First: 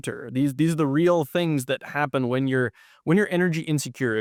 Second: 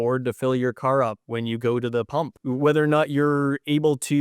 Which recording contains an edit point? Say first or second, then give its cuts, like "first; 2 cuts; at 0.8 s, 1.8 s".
second; 2 cuts; at 1.2 s, 2.3 s